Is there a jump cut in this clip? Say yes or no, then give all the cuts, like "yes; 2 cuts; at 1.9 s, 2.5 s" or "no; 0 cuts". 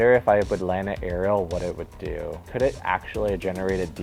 no; 0 cuts